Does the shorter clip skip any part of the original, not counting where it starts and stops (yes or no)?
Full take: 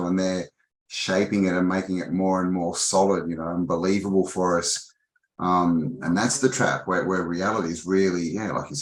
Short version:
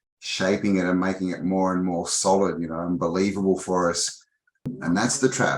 yes